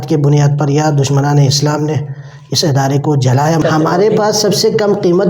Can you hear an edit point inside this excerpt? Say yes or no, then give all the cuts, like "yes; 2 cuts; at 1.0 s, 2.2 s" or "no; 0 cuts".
yes; 1 cut; at 3.6 s